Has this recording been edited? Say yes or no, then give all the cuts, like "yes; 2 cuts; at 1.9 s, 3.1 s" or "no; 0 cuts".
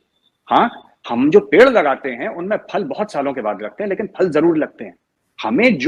no; 0 cuts